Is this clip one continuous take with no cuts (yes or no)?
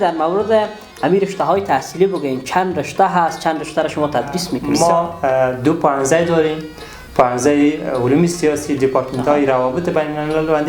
no